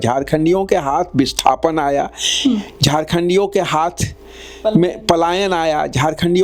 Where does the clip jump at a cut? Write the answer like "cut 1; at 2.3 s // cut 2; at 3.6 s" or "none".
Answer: none